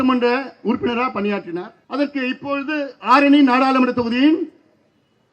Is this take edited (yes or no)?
yes